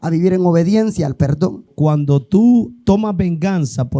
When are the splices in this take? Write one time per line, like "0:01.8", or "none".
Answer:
0:01.7